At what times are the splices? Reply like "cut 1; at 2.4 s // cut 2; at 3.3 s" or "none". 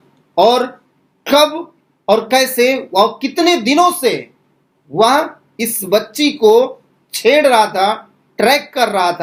none